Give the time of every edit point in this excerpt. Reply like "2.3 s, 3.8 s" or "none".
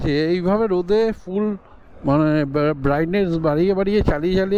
none